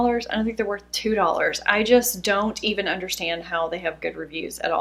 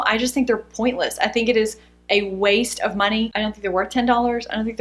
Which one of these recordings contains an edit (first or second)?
second